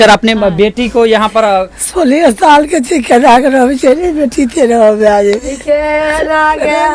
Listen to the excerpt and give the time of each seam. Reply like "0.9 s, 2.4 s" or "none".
none

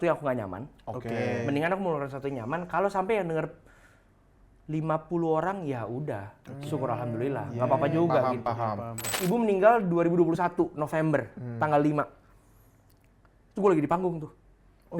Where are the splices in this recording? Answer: 9.1 s

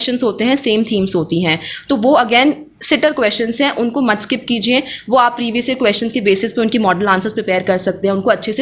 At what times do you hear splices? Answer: none

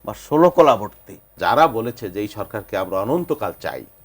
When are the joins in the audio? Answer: 1.3 s

